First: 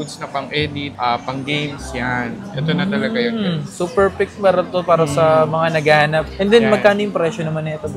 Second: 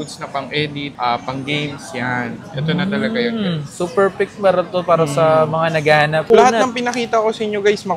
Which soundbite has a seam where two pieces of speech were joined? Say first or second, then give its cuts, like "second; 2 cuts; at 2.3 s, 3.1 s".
second; 1 cut; at 6.3 s